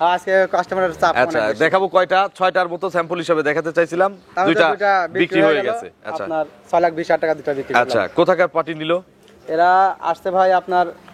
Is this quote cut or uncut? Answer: uncut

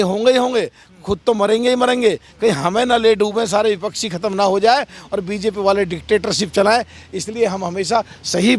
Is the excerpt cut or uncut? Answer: uncut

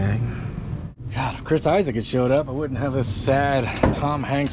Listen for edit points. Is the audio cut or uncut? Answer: cut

